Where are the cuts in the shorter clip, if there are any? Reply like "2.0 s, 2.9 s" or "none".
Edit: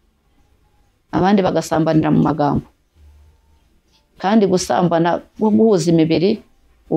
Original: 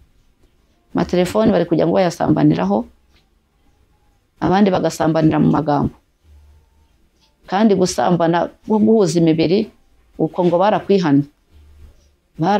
none